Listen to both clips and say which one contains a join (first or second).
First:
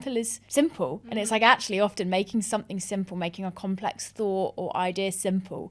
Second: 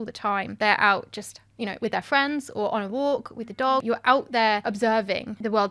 second